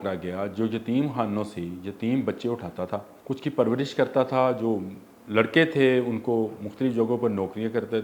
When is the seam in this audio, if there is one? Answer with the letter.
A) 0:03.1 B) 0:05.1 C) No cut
A